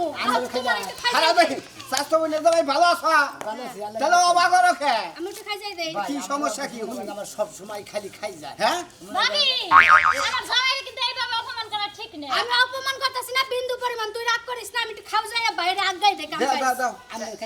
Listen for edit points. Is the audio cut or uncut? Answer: uncut